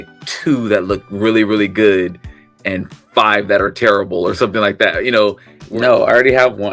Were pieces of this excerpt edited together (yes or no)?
yes